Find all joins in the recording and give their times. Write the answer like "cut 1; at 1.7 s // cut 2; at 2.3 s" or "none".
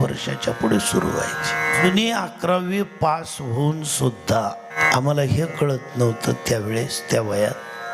cut 1; at 1.8 s // cut 2; at 4.8 s